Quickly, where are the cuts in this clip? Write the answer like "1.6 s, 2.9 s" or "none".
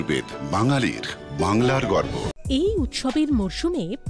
2.4 s